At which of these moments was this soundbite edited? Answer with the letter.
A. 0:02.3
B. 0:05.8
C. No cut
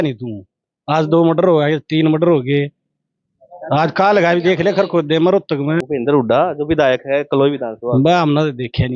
B